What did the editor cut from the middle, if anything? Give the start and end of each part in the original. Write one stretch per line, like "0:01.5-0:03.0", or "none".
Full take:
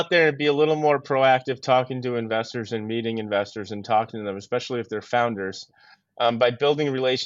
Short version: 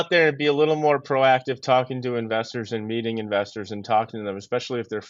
none